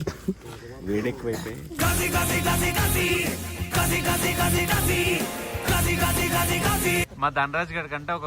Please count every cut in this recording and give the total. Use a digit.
1